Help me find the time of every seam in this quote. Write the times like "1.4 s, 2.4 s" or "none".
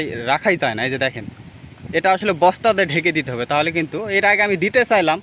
none